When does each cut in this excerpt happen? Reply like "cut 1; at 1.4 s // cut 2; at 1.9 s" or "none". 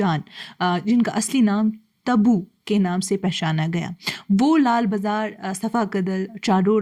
none